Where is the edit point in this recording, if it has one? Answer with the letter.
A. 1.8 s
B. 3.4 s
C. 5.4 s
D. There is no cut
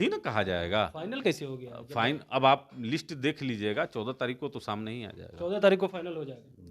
D